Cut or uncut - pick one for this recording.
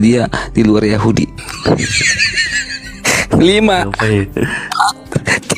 uncut